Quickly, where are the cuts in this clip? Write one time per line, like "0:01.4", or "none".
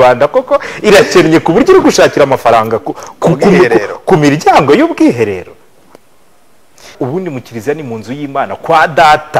0:06.9